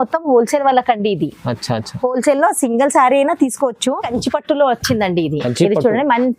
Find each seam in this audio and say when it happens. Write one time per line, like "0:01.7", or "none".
0:04.1